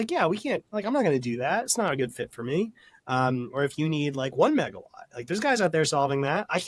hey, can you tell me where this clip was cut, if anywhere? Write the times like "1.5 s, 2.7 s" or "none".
none